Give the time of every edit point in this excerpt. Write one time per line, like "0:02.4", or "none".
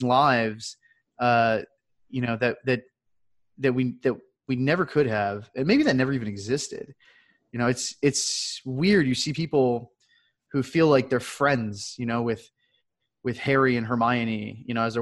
none